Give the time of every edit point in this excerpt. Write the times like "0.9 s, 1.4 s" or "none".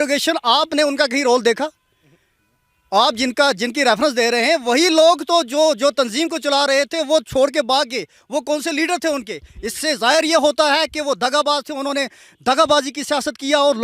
none